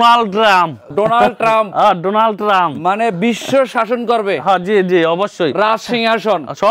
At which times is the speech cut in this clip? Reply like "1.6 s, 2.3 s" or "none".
none